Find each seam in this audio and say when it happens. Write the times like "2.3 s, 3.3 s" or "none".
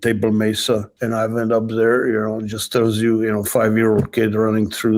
0.9 s